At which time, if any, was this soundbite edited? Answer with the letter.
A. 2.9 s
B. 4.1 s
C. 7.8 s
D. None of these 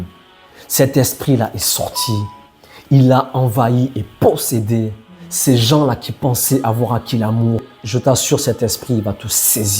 C